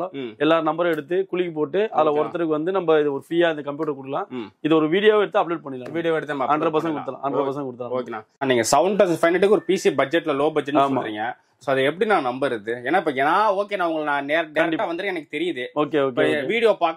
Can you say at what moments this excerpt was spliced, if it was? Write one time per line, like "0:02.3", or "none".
0:08.2